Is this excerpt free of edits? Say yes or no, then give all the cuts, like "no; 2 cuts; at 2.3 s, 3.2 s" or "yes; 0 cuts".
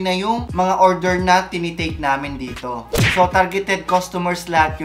no; 1 cut; at 3.0 s